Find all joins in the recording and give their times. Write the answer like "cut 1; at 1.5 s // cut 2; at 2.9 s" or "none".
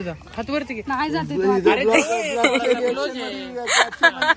none

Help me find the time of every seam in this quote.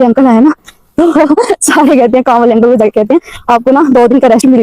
none

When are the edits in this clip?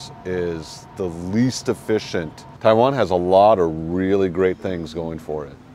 cut 1; at 2.4 s

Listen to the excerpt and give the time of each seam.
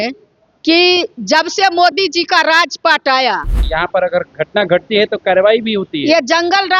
cut 1; at 3.6 s

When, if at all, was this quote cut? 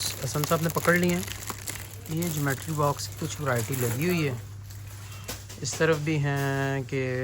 none

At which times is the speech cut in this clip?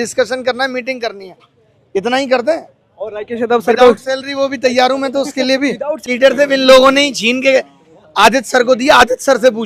cut 1; at 6.0 s

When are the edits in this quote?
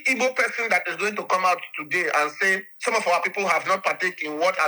none

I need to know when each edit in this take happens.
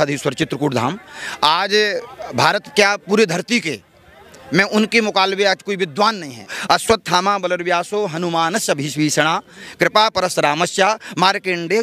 cut 1; at 6.5 s

